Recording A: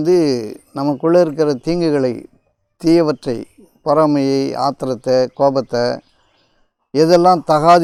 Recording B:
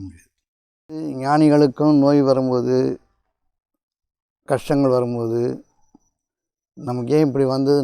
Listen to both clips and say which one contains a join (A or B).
B